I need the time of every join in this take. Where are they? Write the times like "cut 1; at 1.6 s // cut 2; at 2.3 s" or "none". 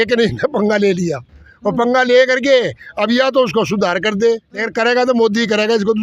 cut 1; at 4.6 s

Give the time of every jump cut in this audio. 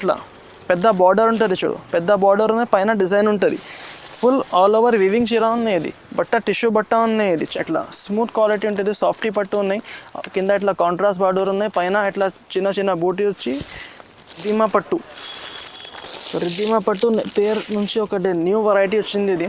cut 1; at 7.5 s // cut 2; at 14.4 s

